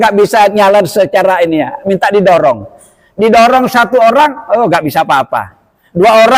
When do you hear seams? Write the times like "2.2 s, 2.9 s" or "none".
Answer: none